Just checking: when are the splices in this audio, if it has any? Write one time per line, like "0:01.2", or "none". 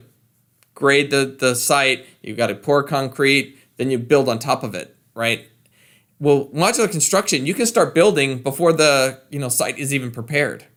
none